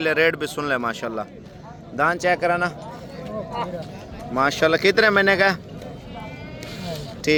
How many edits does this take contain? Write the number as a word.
zero